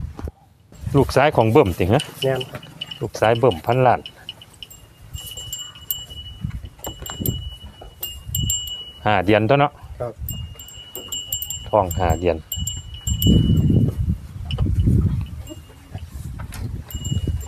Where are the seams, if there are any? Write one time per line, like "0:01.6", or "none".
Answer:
none